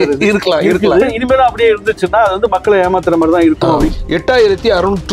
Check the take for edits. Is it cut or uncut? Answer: cut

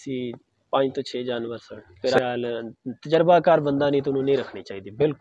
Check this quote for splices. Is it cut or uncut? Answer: cut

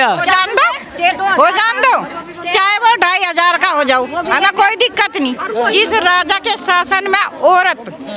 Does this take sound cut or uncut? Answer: cut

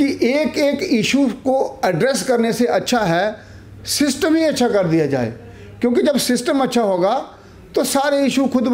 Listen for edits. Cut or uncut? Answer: uncut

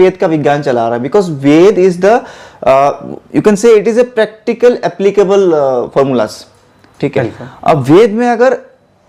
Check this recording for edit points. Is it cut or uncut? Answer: uncut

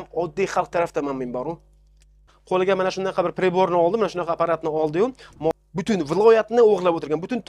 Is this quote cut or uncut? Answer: cut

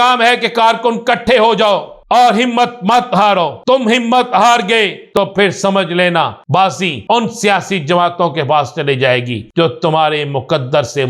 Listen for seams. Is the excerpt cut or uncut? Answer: cut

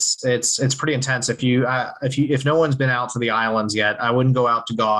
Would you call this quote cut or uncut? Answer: uncut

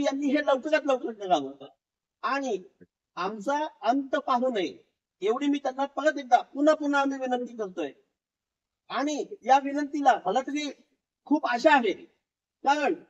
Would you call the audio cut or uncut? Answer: uncut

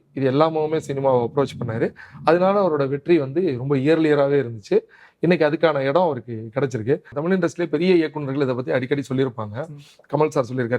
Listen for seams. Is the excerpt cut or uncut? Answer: cut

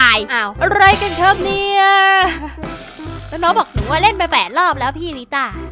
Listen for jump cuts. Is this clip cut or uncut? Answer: cut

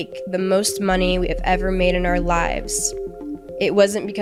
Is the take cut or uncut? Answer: uncut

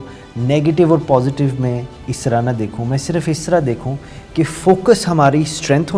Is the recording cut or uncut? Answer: uncut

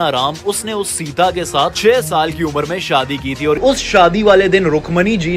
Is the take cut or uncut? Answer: cut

